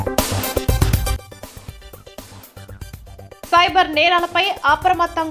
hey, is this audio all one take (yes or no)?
no